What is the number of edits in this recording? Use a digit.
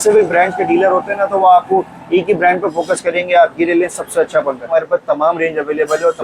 1